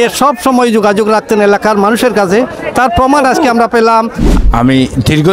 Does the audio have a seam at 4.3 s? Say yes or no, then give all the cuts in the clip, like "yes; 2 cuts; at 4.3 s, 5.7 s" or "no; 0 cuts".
yes; 1 cut; at 4.3 s